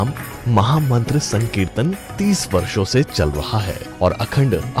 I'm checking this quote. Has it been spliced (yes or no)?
no